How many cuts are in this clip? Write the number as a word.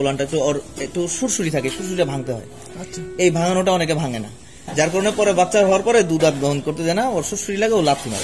zero